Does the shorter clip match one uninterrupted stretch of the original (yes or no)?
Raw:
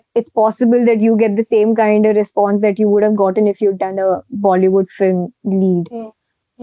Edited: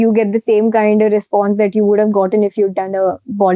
yes